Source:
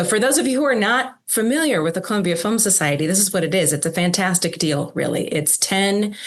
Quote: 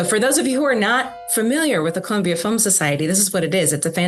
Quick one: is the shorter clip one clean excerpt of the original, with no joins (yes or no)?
yes